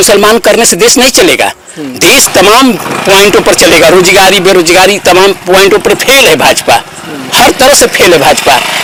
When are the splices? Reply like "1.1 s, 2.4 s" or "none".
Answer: none